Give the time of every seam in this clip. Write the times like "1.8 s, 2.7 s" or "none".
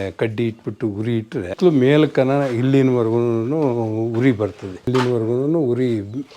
1.5 s, 4.7 s